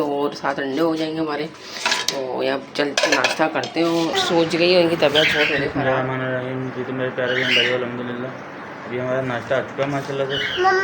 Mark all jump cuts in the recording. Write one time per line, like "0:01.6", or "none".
0:04.2